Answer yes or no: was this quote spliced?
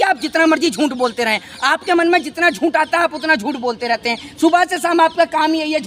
no